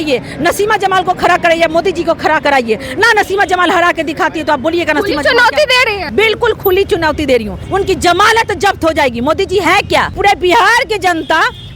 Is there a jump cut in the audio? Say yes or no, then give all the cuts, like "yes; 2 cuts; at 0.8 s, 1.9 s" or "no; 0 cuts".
yes; 3 cuts; at 6.0 s, 7.6 s, 10.2 s